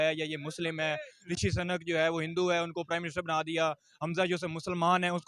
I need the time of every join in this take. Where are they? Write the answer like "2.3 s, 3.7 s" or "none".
none